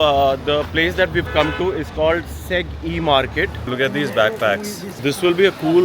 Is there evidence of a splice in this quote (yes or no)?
yes